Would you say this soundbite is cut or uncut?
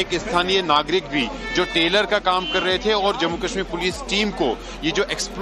uncut